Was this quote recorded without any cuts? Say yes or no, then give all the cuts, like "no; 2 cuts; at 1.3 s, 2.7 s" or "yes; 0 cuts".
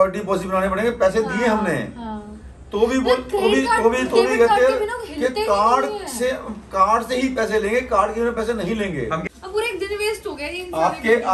no; 1 cut; at 9.2 s